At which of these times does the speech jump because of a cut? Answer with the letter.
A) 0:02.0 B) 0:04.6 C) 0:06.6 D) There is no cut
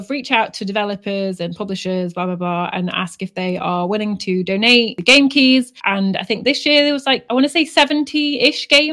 D